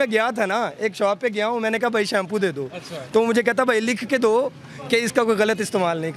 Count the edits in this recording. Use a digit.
0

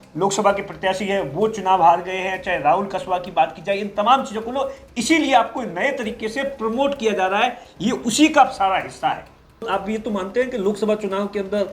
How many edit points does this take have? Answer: 1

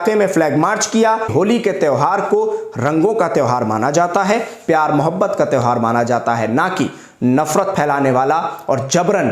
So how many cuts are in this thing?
1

